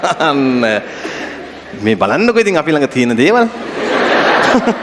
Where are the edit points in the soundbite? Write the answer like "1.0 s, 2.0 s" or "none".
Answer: none